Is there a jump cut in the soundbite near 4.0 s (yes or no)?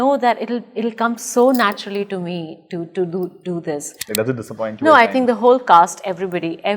yes